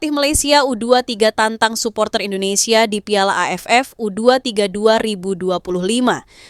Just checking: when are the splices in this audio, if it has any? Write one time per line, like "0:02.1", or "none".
none

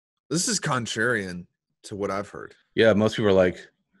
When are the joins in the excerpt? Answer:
0:02.6

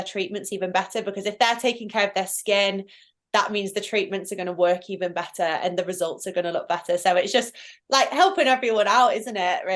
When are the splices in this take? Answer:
none

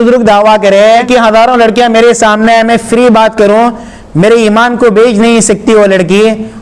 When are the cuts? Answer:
0:01.1

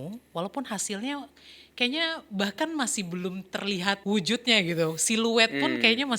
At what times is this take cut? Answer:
0:04.0

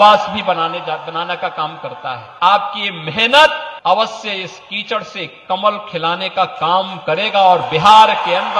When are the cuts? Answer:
0:02.2
0:03.7

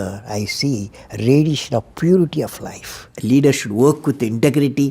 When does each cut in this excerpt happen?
0:03.1

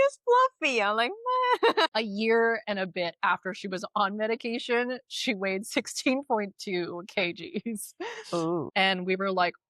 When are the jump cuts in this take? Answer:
0:01.9
0:08.7

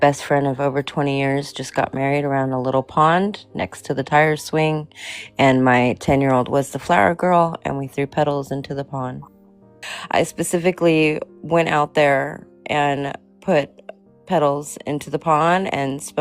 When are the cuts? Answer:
0:09.9

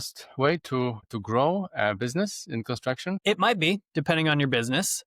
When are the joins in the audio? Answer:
0:01.1
0:03.2

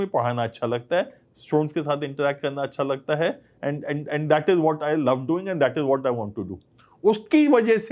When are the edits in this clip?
none

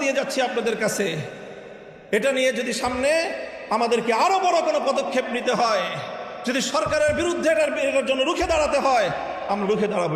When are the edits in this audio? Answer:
0:04.0

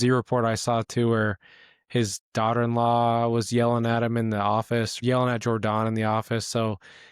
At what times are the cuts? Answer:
0:04.9

